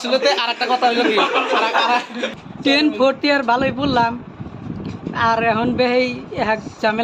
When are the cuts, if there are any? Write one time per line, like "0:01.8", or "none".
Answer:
0:02.3